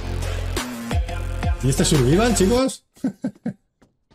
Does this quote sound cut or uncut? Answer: uncut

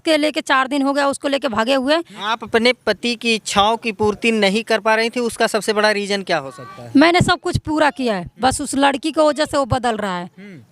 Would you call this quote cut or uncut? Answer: cut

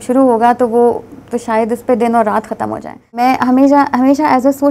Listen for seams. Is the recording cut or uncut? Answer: cut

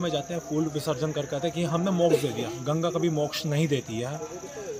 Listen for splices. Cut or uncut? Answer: uncut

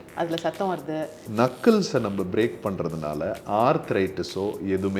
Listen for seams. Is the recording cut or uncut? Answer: cut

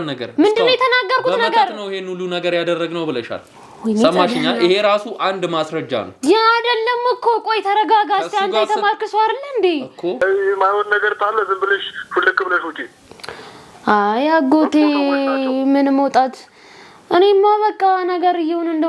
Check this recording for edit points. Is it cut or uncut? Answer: cut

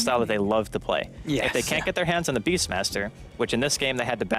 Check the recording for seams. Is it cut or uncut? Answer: uncut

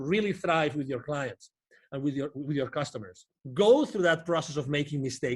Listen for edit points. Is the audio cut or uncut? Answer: cut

